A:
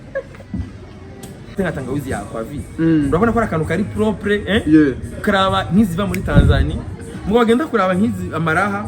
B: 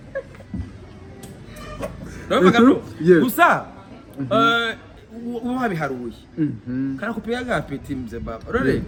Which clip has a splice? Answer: A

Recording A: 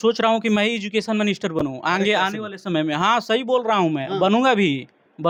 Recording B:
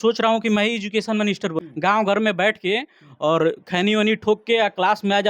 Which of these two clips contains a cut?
B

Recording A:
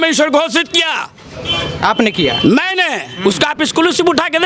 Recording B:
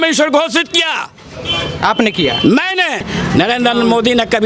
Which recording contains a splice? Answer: B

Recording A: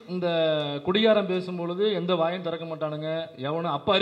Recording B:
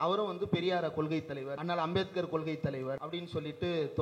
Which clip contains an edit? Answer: B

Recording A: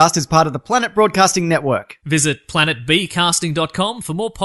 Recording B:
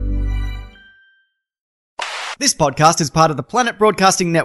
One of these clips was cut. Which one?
B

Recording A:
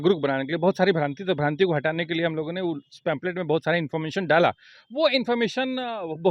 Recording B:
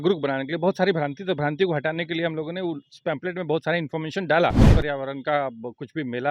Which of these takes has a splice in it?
B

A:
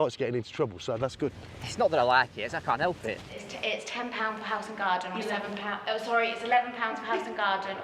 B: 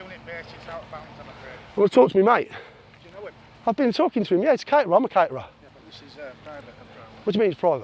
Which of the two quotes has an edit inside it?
A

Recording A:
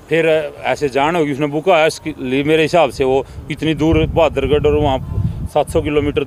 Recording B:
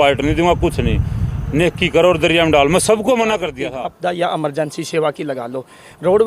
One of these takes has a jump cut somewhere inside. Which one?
B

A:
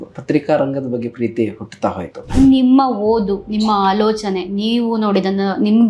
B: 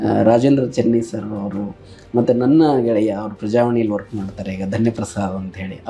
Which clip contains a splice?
A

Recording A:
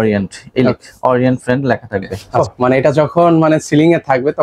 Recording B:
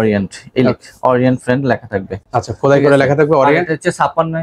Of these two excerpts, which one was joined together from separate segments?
A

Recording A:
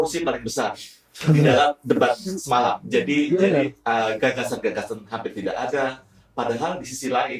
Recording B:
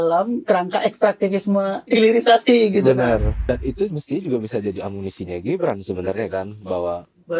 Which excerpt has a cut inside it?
B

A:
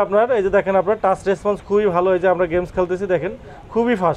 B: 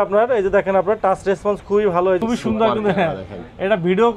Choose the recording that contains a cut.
B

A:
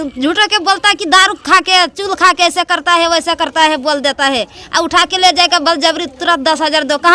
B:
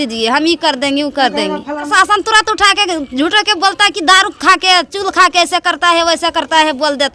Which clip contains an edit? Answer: B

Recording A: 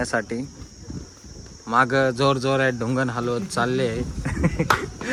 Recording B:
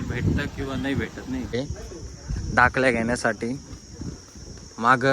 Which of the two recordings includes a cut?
B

